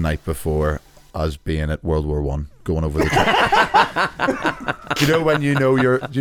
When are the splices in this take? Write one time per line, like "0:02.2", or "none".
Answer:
none